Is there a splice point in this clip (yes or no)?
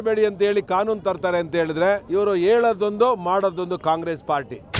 yes